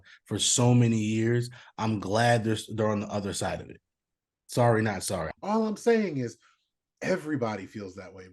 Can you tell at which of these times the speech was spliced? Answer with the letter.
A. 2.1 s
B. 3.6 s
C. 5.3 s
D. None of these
C